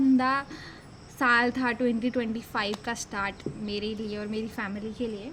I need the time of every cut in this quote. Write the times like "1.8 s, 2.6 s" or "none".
none